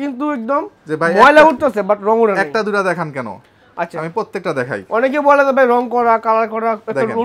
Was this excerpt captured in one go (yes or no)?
yes